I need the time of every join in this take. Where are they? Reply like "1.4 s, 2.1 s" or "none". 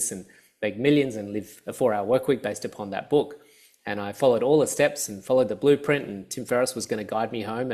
none